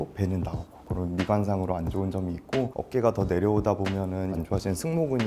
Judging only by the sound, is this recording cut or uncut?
cut